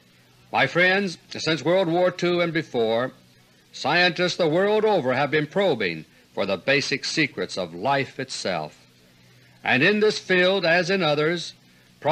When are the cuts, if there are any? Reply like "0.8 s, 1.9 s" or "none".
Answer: none